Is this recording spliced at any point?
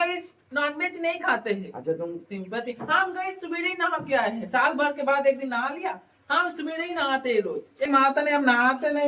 yes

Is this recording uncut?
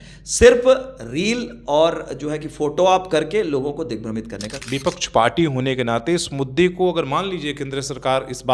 no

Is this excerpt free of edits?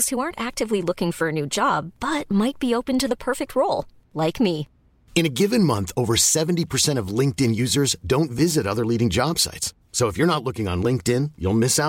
yes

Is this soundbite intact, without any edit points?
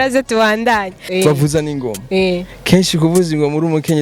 no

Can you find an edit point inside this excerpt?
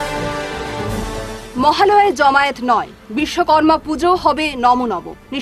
no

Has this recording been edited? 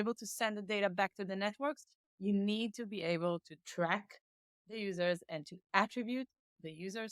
yes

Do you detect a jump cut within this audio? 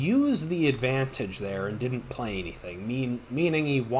no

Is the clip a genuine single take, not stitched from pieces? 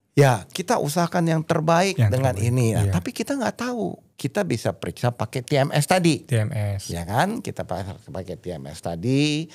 no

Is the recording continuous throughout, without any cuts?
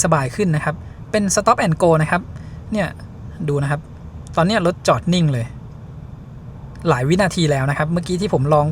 yes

